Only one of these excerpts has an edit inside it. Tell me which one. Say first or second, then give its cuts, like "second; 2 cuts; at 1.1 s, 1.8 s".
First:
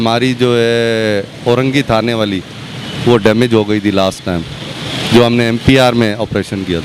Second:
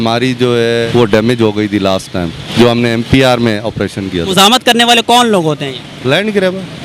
second; 3 cuts; at 0.9 s, 2.4 s, 4.3 s